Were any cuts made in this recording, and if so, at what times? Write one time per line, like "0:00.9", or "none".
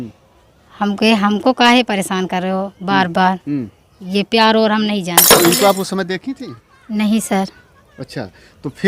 0:05.2